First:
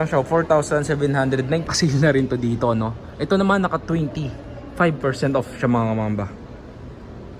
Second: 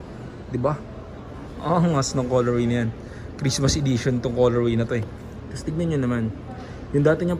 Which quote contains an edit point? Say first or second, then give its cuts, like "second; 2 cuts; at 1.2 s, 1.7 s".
first; 1 cut; at 1.7 s